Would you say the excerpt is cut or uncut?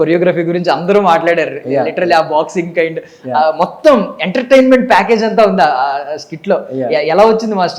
uncut